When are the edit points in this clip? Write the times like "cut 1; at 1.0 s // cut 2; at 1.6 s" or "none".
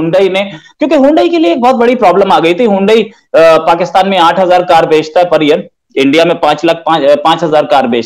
none

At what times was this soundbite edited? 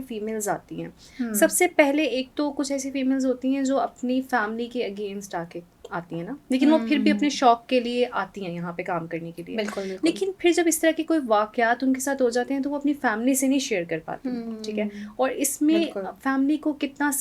none

